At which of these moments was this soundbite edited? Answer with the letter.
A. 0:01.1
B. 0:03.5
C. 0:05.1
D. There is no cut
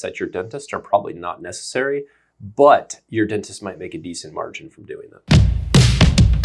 C